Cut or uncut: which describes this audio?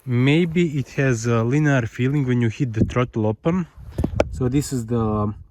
cut